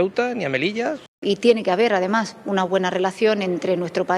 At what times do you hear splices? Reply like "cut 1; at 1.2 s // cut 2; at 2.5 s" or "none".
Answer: cut 1; at 1.0 s

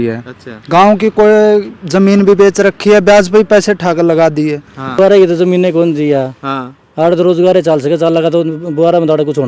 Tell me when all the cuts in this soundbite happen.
cut 1; at 5.0 s

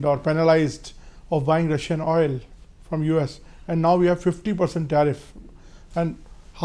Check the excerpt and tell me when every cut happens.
none

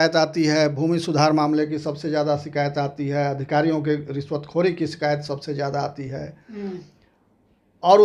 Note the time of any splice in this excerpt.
none

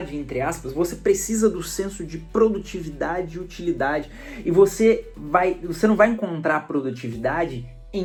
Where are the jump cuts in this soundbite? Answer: none

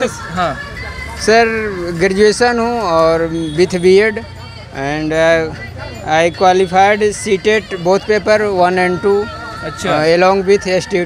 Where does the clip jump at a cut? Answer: none

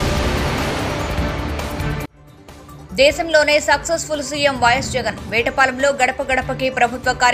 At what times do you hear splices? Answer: cut 1; at 1.2 s

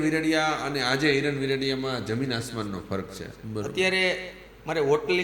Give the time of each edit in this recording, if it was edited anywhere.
cut 1; at 3.2 s

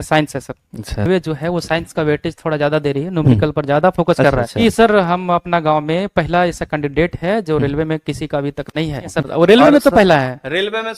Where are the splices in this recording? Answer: cut 1; at 0.9 s // cut 2; at 4.6 s // cut 3; at 9.1 s

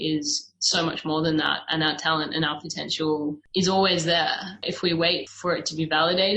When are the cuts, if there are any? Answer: cut 1; at 5.3 s

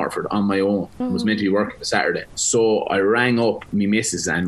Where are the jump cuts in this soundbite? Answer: cut 1; at 0.9 s // cut 2; at 2.3 s

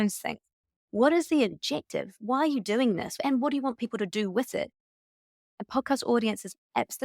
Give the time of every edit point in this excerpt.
cut 1; at 3.2 s // cut 2; at 5.0 s

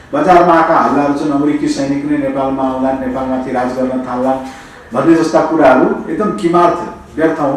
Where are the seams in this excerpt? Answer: none

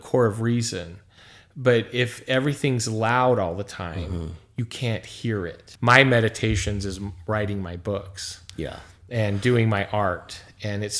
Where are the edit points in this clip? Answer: cut 1; at 5.6 s

